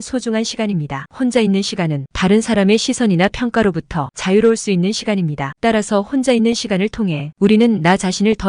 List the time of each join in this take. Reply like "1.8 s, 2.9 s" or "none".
5.5 s, 7.3 s